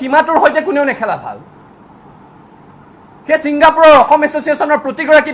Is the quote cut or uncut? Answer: uncut